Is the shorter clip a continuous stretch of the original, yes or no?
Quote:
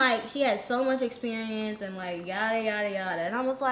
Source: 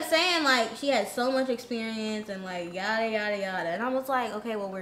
yes